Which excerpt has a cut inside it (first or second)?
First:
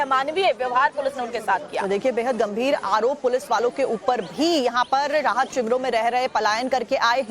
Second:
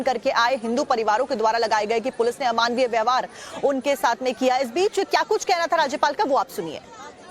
first